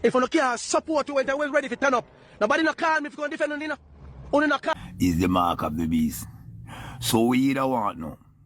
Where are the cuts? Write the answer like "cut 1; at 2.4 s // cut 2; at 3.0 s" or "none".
cut 1; at 4.7 s